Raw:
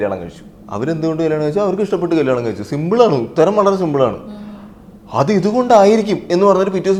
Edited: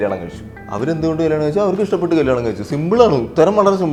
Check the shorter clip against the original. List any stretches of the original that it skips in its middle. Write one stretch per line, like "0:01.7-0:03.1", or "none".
none